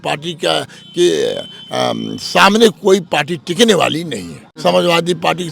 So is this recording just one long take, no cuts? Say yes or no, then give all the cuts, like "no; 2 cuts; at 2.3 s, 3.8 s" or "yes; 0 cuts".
no; 1 cut; at 4.5 s